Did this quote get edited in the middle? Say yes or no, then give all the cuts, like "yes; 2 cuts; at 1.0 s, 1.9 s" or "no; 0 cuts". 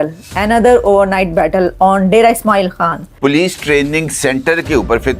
yes; 1 cut; at 3.0 s